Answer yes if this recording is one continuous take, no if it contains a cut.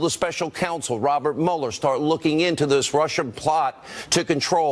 no